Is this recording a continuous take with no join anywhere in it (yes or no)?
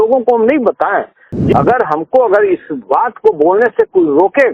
no